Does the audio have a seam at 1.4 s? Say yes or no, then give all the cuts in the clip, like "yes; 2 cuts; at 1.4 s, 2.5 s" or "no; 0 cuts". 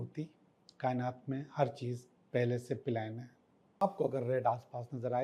no; 1 cut; at 3.8 s